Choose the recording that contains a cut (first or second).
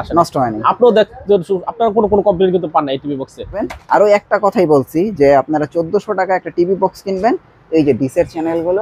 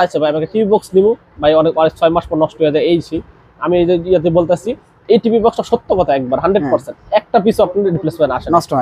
first